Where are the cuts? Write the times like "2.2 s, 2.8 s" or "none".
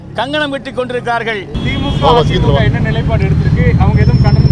1.5 s